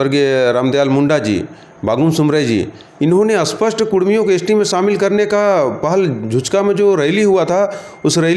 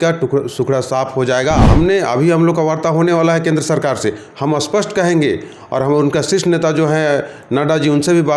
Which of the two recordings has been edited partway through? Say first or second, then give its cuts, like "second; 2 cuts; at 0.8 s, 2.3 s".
second; 1 cut; at 1.6 s